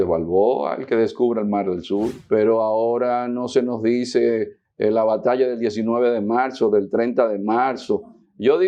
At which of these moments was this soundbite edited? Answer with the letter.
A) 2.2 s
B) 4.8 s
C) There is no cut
A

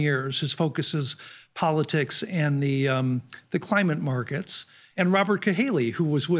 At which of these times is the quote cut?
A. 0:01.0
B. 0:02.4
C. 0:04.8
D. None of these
C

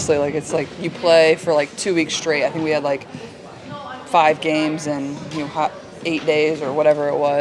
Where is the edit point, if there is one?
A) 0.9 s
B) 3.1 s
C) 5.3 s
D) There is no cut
D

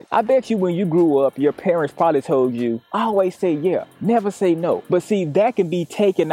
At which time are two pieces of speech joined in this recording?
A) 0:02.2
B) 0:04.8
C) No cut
B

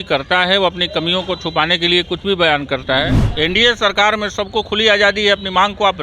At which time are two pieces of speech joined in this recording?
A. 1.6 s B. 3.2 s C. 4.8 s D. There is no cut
B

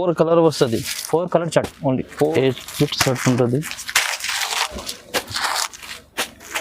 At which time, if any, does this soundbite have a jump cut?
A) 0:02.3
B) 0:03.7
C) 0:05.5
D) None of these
A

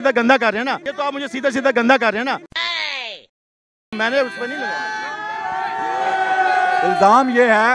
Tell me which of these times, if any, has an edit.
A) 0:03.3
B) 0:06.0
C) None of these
C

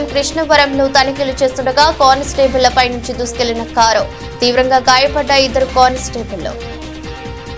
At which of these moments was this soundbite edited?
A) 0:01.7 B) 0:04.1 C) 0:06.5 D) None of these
C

